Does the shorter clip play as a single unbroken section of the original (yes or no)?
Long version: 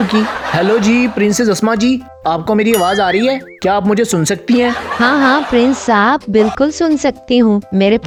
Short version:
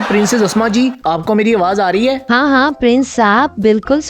no